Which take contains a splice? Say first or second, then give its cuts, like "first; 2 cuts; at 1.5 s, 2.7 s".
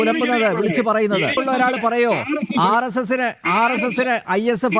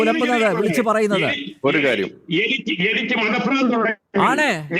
first; 1 cut; at 1.4 s